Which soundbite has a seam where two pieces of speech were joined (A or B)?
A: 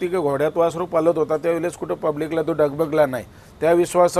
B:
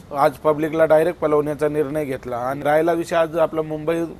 B